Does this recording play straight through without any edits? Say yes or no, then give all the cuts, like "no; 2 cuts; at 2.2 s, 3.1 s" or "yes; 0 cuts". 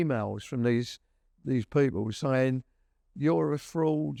yes; 0 cuts